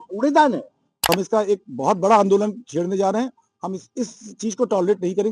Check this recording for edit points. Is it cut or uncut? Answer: cut